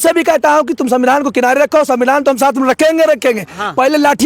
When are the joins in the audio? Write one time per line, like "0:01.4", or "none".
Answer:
none

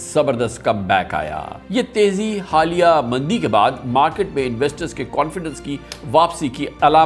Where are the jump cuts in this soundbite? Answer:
0:01.6

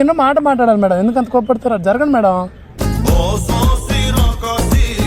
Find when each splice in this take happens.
none

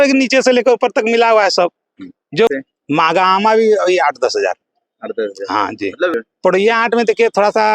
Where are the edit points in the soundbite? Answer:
0:02.5
0:06.1

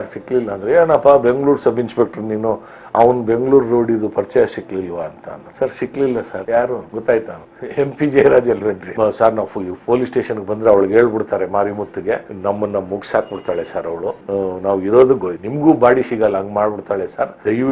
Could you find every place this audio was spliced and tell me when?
0:08.9

